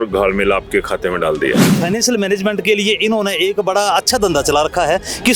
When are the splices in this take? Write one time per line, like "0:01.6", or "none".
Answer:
0:01.8